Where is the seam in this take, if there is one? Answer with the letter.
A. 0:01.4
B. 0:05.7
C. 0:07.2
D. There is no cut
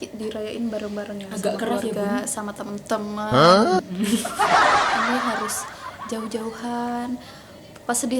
D